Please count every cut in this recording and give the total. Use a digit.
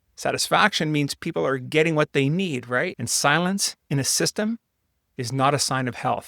1